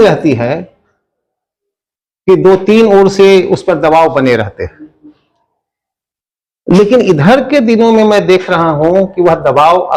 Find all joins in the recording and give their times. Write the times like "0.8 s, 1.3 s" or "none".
none